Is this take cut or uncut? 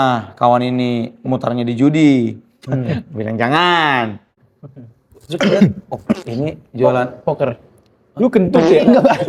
uncut